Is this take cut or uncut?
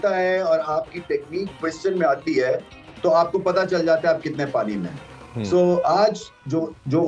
uncut